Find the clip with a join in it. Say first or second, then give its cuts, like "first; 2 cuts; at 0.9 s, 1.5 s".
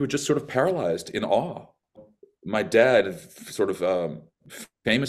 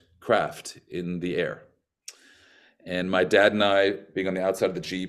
first; 1 cut; at 2.0 s